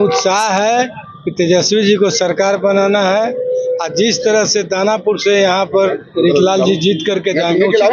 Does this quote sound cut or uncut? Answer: uncut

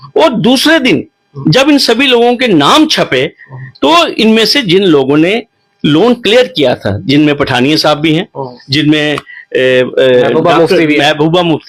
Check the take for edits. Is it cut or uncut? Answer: uncut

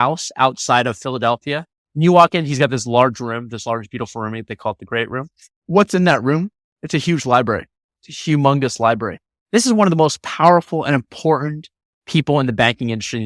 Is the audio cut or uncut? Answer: uncut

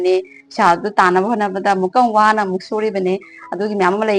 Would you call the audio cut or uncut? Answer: uncut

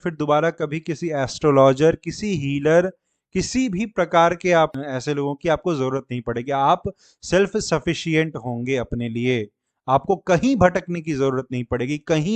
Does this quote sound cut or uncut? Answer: cut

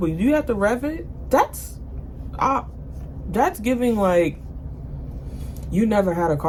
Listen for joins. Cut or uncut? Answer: uncut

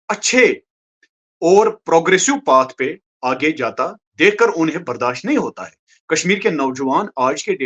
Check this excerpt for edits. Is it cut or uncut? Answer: uncut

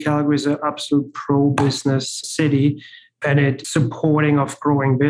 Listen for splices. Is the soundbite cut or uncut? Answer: cut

